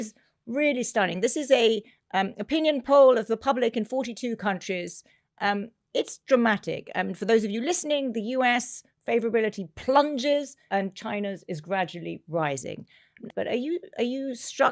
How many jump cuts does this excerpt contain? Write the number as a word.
one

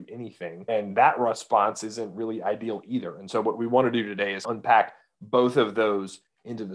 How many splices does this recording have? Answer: one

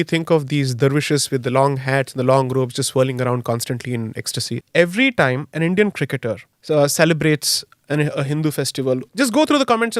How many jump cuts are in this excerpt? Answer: three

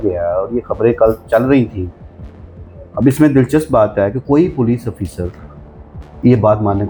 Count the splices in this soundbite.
zero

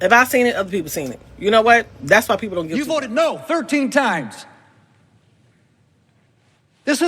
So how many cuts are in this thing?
one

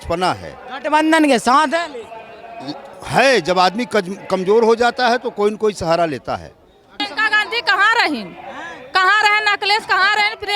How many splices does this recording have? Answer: one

